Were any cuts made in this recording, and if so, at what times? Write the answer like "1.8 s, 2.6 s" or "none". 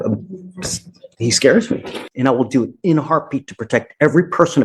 2.0 s